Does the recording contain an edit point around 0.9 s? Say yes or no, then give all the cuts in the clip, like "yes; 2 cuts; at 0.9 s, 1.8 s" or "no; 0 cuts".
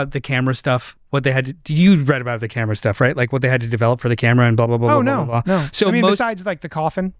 yes; 1 cut; at 0.9 s